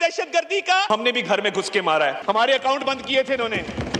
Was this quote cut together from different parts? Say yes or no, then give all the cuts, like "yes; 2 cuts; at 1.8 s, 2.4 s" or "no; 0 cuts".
yes; 2 cuts; at 0.9 s, 2.2 s